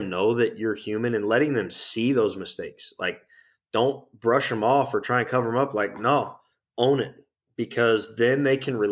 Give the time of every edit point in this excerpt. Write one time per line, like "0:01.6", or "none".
none